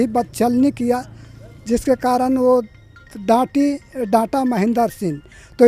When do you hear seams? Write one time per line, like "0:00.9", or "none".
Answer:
none